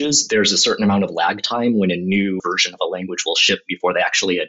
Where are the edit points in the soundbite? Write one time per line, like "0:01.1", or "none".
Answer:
0:02.4